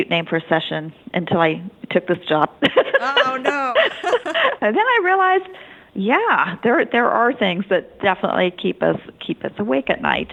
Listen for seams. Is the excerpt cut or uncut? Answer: uncut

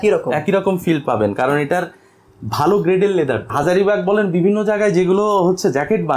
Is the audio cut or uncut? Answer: cut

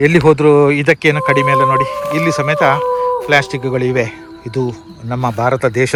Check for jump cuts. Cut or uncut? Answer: uncut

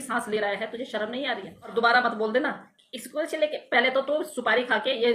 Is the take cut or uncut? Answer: cut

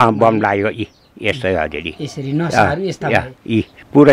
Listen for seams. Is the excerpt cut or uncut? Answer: uncut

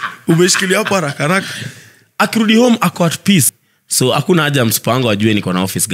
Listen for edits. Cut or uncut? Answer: cut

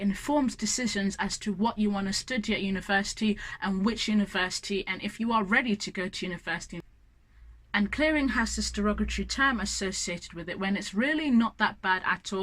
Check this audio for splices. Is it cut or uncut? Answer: cut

